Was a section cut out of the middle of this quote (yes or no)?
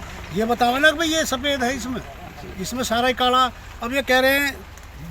no